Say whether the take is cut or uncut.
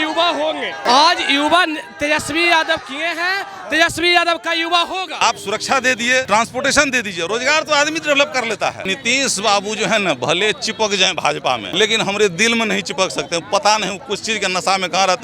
cut